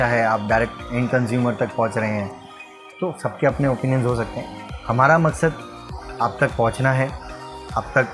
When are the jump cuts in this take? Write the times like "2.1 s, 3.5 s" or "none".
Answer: none